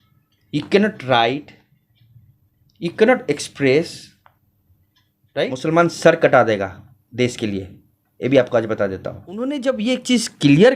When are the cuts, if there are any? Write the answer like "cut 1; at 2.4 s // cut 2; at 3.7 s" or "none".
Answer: cut 1; at 5.6 s // cut 2; at 9.4 s